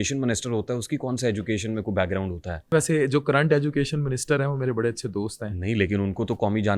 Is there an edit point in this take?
yes; 1 cut; at 2.7 s

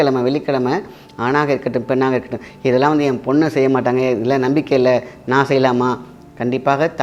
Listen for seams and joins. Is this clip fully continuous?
yes; 0 cuts

